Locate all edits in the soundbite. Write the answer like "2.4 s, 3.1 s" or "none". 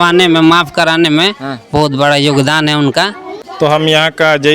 3.6 s